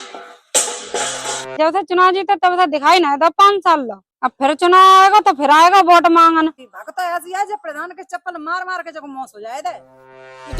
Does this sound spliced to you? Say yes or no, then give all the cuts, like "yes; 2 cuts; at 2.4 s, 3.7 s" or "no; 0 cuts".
yes; 2 cuts; at 1.5 s, 6.7 s